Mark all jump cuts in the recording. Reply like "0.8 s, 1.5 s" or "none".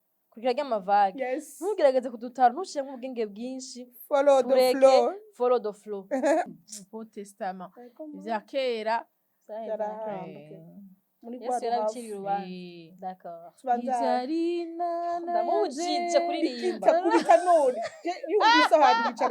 6.5 s